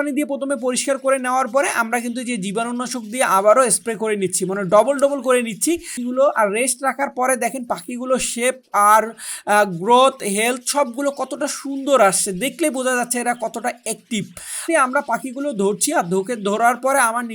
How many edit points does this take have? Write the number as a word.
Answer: two